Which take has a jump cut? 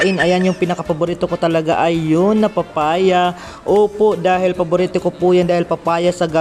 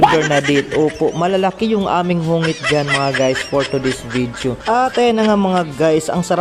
second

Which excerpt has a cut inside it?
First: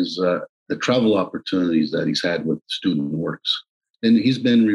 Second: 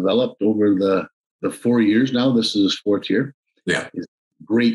first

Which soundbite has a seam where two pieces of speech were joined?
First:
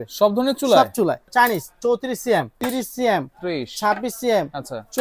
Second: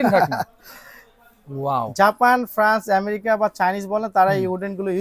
first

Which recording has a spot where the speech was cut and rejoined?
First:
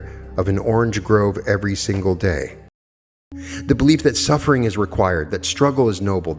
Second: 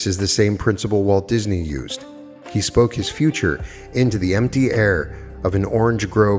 first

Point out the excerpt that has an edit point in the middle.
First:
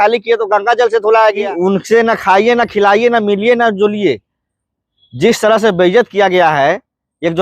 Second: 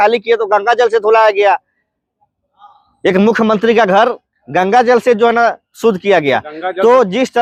first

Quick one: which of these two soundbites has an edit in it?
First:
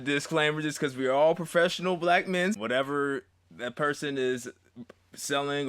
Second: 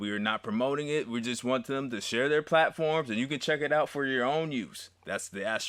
first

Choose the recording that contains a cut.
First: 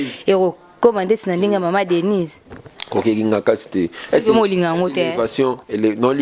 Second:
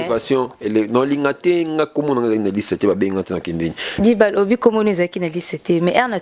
second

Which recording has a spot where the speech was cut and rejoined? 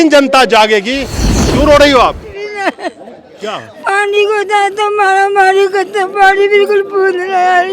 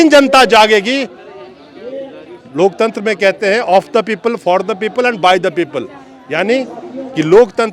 first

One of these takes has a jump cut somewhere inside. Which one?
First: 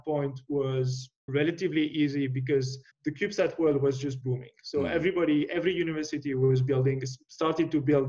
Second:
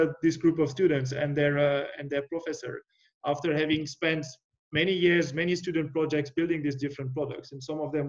first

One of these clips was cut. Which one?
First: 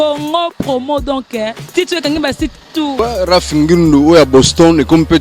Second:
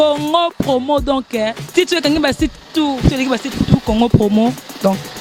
first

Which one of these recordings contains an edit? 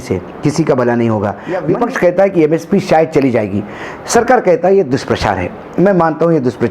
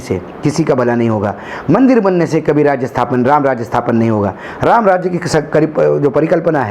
first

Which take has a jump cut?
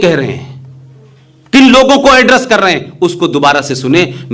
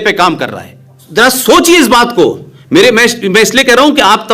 second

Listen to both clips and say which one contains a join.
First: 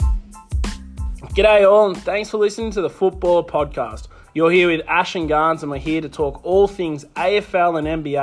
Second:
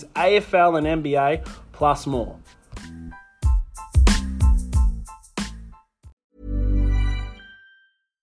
second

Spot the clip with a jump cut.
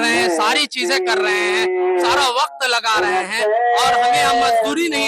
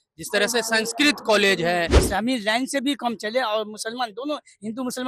second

